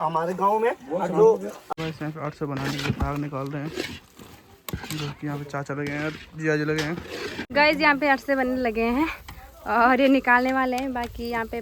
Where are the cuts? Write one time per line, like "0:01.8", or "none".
0:01.5
0:07.4